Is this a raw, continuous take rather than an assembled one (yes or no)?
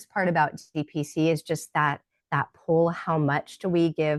yes